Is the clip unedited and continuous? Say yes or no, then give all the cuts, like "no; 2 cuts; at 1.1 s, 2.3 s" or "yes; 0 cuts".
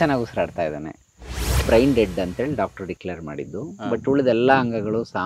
no; 1 cut; at 1.6 s